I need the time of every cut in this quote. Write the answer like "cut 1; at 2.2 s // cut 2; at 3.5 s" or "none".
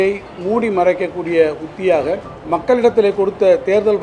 cut 1; at 2.3 s